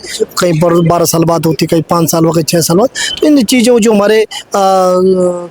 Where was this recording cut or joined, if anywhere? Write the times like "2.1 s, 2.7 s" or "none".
none

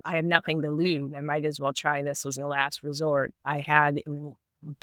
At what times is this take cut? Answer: none

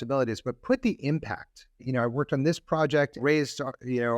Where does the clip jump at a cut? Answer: 1.9 s, 3.2 s

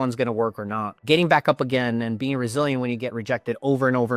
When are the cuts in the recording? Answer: 1.0 s

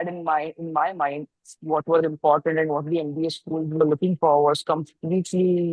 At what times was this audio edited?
none

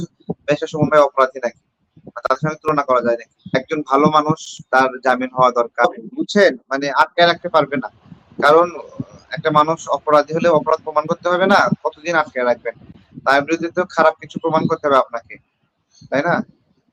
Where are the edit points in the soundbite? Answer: 3.5 s, 5.8 s

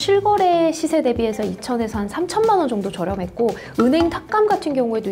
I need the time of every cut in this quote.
none

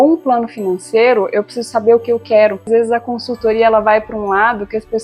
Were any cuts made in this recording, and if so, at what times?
2.7 s

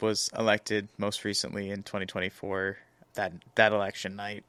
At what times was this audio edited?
none

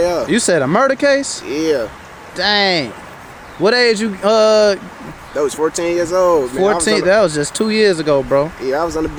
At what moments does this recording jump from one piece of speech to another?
none

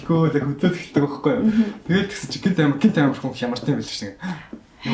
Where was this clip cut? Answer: none

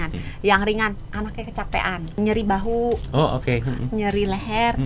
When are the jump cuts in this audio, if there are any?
2.2 s

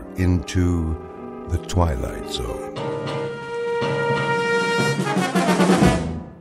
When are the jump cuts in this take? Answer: 2.1 s

